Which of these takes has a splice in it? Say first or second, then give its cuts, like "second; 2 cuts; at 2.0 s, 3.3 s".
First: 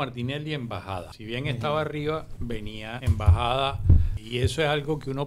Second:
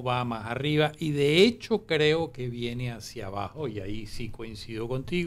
first; 3 cuts; at 1.1 s, 3.0 s, 4.1 s